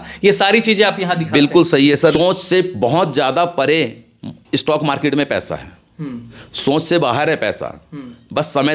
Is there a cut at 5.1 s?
no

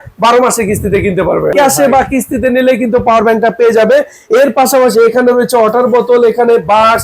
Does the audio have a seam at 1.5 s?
yes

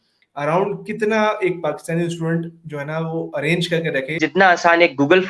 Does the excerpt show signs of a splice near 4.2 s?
yes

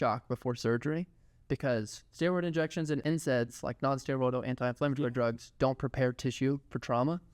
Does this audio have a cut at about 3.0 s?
yes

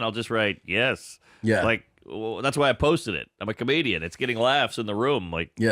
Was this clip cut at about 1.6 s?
no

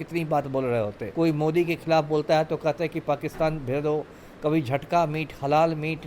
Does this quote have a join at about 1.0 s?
yes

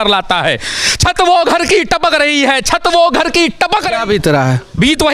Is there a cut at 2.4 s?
no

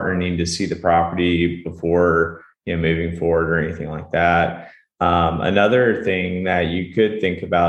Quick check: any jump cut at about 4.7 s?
no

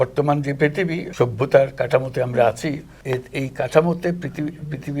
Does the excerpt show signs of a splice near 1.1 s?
yes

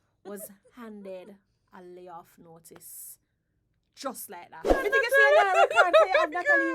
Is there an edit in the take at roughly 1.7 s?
no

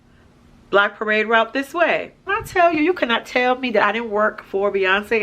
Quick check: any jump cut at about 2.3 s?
yes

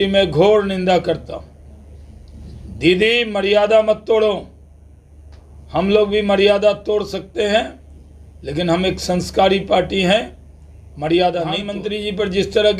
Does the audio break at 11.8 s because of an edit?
yes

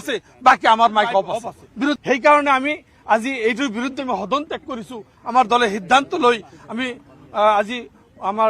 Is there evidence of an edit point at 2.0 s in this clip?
yes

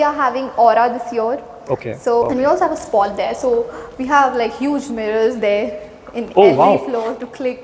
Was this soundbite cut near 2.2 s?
yes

